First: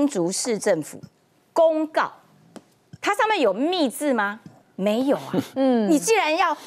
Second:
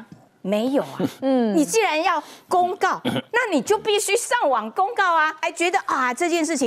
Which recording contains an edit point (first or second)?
second